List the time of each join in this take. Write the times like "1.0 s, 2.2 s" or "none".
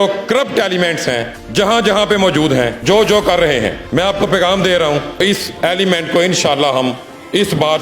5.2 s